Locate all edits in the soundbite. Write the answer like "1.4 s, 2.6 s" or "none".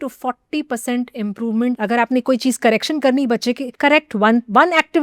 1.8 s, 3.7 s